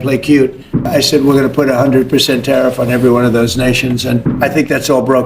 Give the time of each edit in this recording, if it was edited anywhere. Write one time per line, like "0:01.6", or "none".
0:00.8
0:04.3